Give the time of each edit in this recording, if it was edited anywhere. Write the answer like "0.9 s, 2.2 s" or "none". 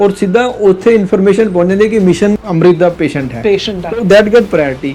2.4 s